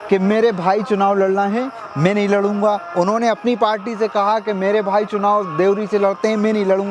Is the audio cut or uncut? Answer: uncut